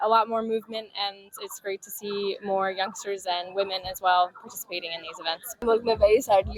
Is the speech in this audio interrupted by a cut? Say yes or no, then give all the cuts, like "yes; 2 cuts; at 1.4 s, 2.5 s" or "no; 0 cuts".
yes; 1 cut; at 5.5 s